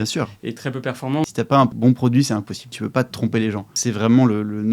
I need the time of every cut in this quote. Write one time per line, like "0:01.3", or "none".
0:01.7
0:02.8
0:03.7